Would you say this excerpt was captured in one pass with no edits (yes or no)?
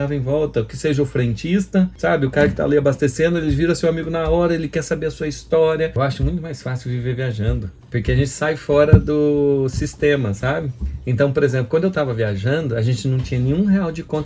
no